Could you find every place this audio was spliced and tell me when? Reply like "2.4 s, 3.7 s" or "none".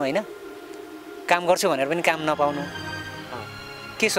none